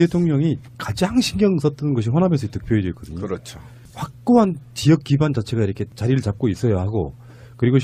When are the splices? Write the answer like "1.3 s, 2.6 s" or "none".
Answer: none